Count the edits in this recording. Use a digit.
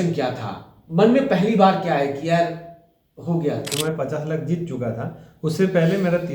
1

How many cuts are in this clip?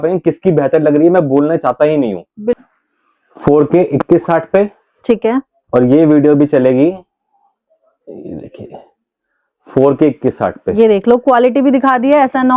1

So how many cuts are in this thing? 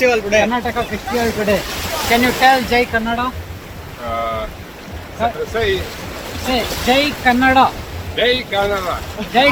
0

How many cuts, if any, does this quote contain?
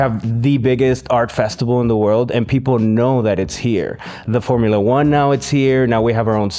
0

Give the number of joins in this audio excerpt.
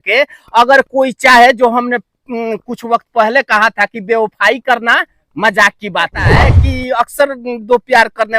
1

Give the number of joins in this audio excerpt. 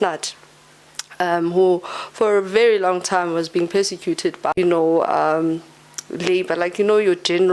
1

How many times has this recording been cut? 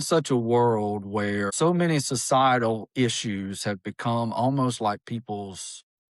1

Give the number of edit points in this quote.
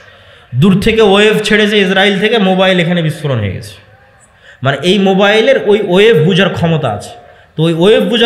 0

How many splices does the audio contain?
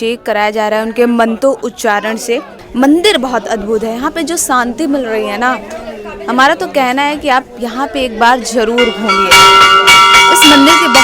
1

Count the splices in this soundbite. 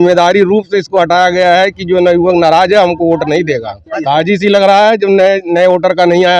1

